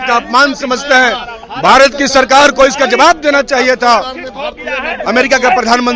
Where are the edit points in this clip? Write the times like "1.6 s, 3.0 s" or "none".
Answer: none